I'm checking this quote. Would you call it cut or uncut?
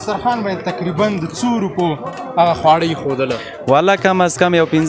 uncut